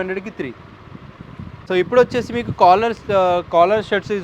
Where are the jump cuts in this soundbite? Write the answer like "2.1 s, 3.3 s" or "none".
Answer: none